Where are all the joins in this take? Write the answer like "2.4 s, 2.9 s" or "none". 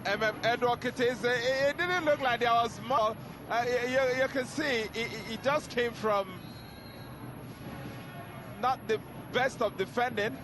3.3 s